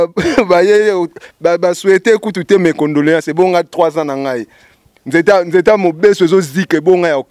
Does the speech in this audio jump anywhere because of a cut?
no; 0 cuts

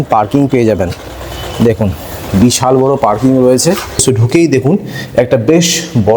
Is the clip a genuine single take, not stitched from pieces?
no; 1 cut; at 4.0 s

